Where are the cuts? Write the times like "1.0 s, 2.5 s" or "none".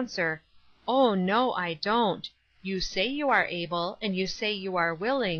none